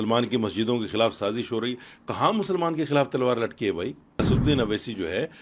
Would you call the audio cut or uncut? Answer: cut